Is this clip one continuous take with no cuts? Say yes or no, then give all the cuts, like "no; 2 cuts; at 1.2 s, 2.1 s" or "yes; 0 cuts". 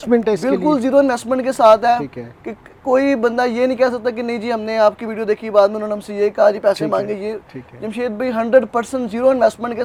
yes; 0 cuts